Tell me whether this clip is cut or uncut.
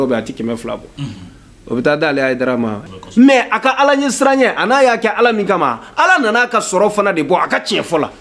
cut